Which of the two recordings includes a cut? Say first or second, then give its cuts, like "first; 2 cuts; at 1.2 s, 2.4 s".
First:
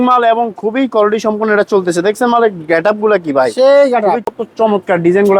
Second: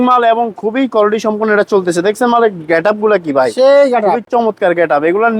first; 1 cut; at 4.2 s